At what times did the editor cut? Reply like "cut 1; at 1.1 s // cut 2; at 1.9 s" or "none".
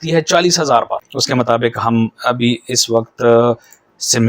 cut 1; at 1.1 s

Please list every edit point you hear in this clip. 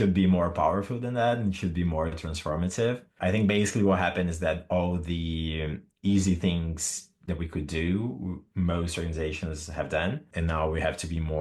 none

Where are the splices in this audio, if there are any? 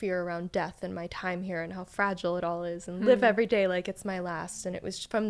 none

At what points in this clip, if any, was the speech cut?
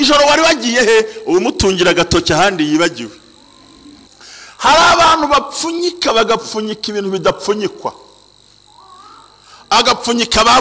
cut 1; at 4.1 s

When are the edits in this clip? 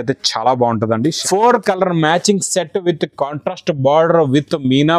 cut 1; at 1.2 s

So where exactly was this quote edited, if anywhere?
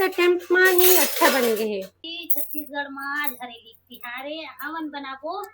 cut 1; at 1.9 s

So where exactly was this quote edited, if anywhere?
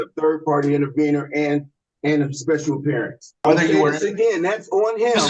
cut 1; at 3.4 s

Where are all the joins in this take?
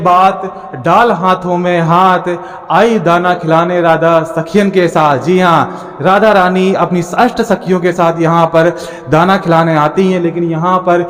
none

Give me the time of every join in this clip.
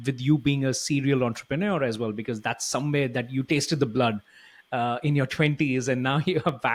none

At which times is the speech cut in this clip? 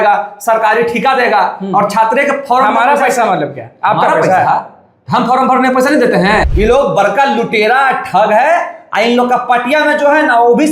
cut 1; at 6.5 s

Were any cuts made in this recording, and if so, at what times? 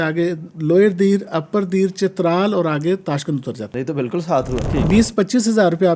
cut 1; at 3.7 s // cut 2; at 4.7 s

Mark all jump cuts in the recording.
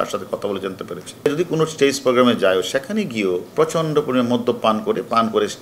cut 1; at 1.3 s // cut 2; at 3.5 s

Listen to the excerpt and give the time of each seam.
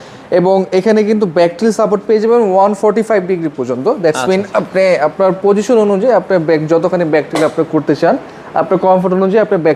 none

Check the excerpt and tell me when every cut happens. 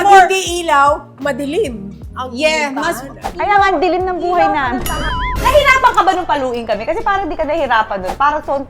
cut 1; at 5.3 s

